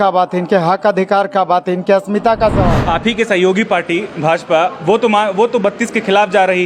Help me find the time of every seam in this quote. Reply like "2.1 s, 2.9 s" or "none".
2.7 s